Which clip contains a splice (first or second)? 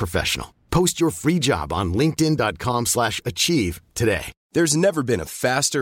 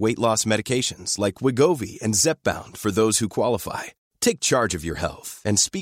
first